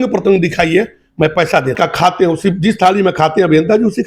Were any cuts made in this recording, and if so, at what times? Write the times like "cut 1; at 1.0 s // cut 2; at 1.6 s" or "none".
cut 1; at 1.8 s